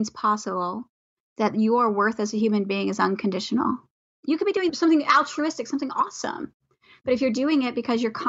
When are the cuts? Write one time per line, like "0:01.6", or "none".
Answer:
0:04.4